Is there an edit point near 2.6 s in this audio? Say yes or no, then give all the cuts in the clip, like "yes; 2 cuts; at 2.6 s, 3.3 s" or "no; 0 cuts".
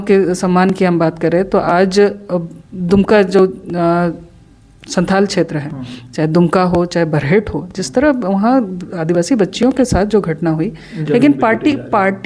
no; 0 cuts